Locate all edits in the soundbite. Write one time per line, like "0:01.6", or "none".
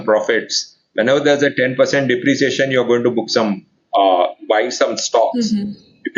none